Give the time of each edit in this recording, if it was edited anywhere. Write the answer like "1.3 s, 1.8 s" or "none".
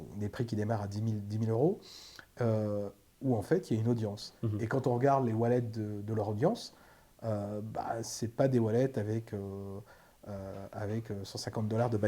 none